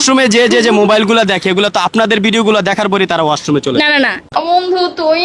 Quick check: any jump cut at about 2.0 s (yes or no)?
no